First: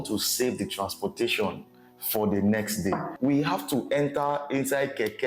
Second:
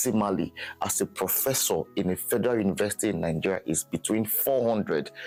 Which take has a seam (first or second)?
first